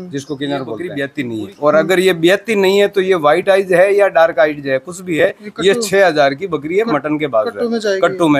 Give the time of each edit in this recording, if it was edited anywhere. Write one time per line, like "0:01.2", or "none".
0:01.0